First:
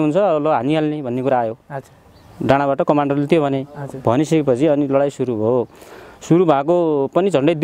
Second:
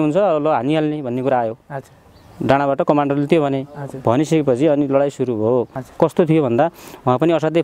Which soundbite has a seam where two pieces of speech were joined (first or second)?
second